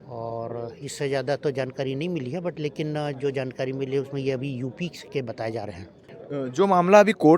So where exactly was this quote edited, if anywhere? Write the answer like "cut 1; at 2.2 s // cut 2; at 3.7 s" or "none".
cut 1; at 6.0 s

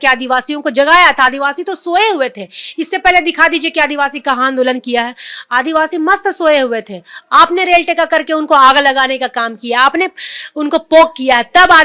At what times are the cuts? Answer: none

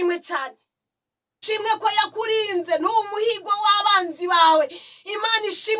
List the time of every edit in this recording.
cut 1; at 1.4 s

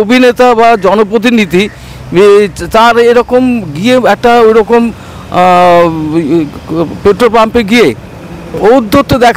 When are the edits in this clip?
none

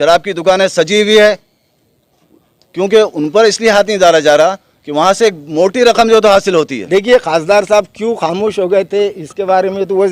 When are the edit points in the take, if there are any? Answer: cut 1; at 6.8 s

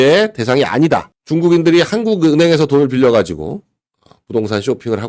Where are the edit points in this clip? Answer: cut 1; at 1.2 s

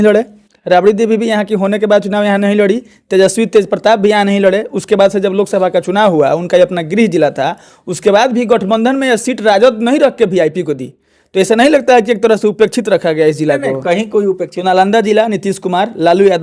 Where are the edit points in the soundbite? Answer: cut 1; at 14.5 s

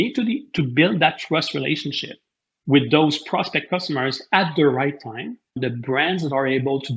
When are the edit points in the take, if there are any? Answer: cut 1; at 5.6 s

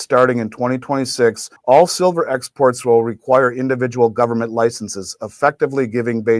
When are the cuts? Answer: cut 1; at 1.5 s

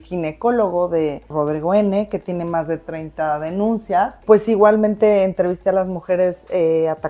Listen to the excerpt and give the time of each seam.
cut 1; at 1.3 s // cut 2; at 4.2 s

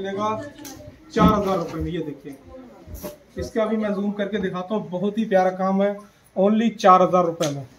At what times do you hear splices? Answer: none

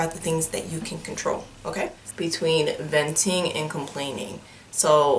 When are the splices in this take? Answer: cut 1; at 2.0 s

